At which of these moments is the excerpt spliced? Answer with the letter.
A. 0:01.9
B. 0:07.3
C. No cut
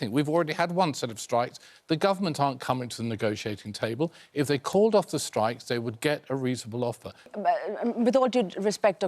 B